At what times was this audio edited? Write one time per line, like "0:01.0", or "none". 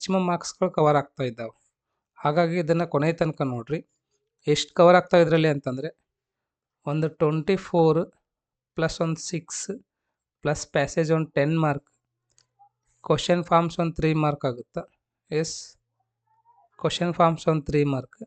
none